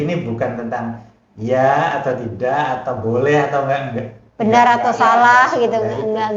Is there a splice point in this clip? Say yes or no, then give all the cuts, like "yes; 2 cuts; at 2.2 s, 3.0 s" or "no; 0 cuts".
no; 0 cuts